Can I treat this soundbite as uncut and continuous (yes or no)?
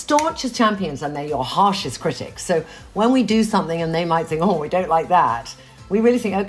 yes